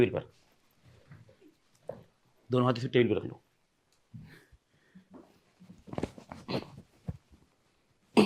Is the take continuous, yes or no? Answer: yes